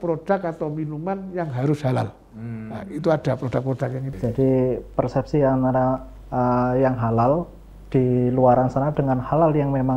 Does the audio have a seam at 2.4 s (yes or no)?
no